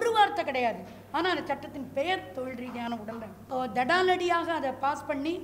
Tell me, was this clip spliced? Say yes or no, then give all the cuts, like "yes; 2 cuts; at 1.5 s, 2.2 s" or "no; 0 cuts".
yes; 1 cut; at 3.3 s